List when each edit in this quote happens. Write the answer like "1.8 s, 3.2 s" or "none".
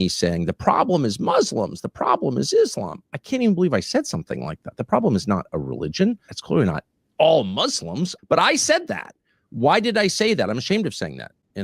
6.3 s, 8.1 s